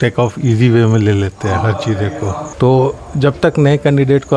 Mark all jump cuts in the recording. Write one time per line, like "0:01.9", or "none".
0:02.4